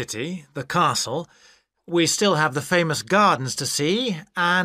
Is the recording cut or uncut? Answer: uncut